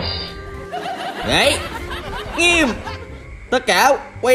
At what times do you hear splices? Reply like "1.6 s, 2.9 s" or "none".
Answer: 1.2 s